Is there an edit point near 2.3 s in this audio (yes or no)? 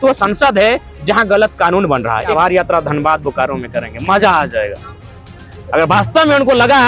yes